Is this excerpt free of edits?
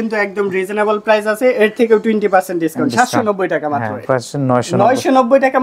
no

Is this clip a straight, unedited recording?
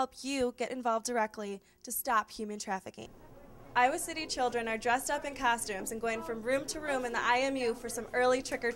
no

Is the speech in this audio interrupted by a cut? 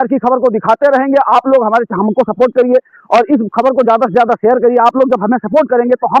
no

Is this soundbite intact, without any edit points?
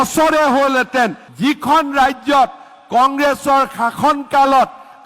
no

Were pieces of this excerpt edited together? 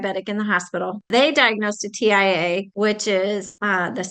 no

